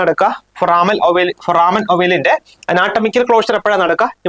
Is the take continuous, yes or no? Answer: yes